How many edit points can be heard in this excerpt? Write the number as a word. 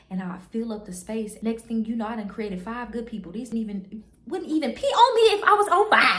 two